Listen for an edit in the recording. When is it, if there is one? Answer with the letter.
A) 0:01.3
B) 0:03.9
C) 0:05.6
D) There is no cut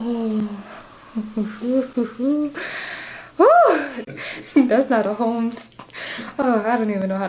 B